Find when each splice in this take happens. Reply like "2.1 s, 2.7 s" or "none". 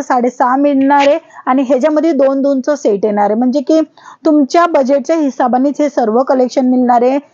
none